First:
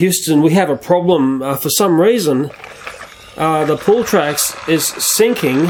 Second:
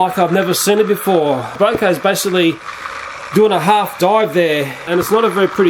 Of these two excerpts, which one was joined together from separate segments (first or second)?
second